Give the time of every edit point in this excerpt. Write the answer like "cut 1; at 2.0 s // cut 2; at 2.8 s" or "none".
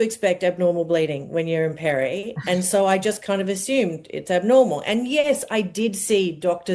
none